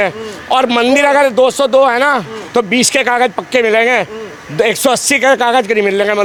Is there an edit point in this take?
no; 0 cuts

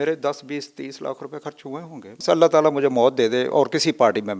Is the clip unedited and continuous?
no; 1 cut; at 2.2 s

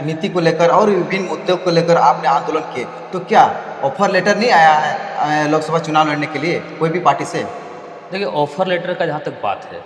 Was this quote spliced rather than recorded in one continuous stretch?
no; 0 cuts

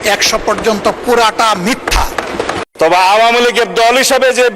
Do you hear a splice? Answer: yes; 1 cut; at 2.6 s

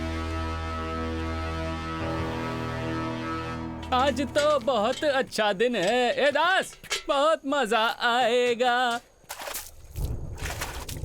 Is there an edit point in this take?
no; 0 cuts

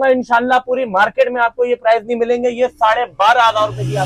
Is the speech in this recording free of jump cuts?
yes; 0 cuts

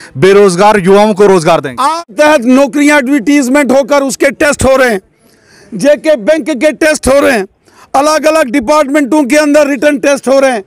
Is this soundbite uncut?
no; 1 cut; at 2.0 s

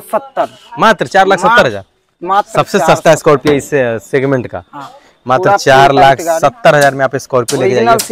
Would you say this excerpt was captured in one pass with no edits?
yes; 0 cuts

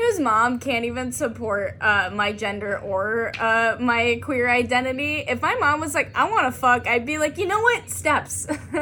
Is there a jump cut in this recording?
no; 0 cuts

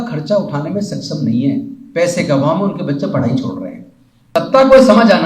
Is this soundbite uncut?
no; 1 cut; at 4.3 s

